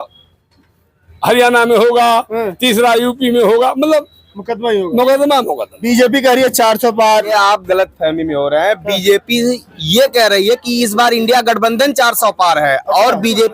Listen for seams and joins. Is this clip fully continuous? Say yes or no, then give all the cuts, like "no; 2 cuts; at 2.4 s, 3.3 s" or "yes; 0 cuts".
no; 2 cuts; at 5.7 s, 7.3 s